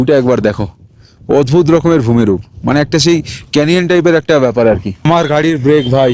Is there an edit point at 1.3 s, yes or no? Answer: no